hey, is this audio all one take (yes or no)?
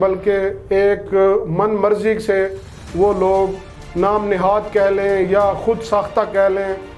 yes